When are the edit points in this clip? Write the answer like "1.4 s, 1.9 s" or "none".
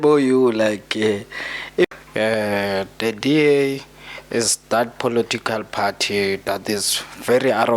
1.9 s